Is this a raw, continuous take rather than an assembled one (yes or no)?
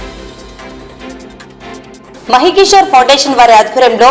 yes